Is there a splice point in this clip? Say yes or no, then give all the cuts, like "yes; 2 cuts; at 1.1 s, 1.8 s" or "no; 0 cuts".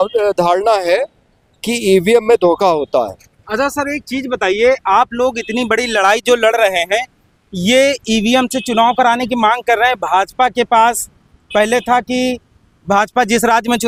no; 0 cuts